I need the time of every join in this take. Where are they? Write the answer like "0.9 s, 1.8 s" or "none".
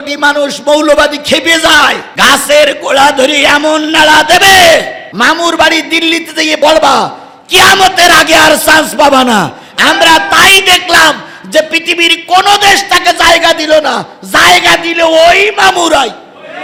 none